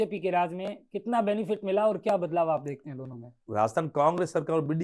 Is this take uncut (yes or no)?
no